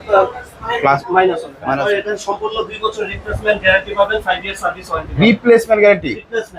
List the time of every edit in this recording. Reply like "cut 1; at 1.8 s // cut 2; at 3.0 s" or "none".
cut 1; at 1.7 s